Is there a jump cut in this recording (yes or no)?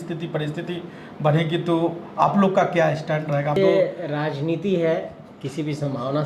yes